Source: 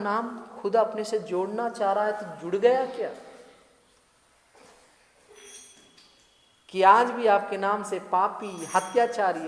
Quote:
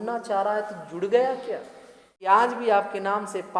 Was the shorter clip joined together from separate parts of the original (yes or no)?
yes